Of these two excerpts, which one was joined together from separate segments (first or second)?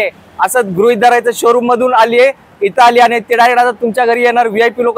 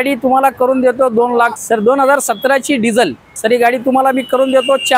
second